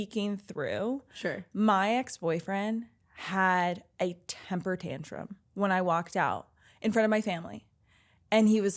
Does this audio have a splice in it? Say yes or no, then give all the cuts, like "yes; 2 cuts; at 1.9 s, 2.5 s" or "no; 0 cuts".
no; 0 cuts